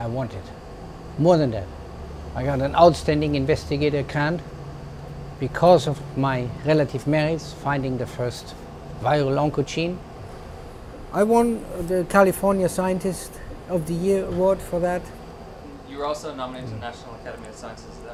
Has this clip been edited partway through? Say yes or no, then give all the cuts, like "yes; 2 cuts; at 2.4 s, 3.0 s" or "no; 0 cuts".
no; 0 cuts